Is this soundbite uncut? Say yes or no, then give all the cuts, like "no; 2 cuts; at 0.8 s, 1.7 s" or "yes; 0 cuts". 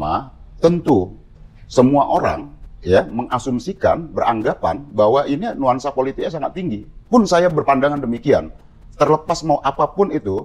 yes; 0 cuts